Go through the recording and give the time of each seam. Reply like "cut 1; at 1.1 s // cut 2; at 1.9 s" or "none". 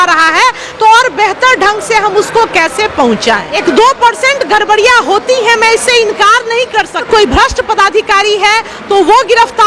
cut 1; at 3.5 s // cut 2; at 7.0 s